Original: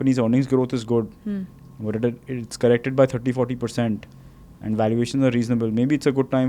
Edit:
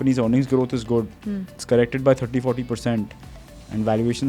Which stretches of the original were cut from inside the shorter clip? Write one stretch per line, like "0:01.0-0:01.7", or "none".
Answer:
0:01.5-0:02.4